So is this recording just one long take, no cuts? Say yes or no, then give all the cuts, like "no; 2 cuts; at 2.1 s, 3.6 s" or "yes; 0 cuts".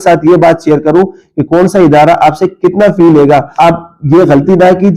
no; 1 cut; at 3.5 s